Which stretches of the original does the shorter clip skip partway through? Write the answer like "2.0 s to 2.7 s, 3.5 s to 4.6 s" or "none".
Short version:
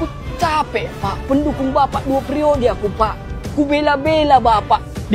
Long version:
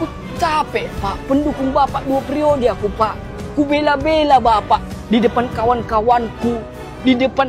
none